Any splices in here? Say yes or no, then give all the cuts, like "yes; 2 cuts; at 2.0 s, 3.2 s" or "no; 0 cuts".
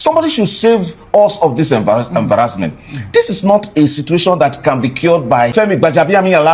yes; 1 cut; at 5.5 s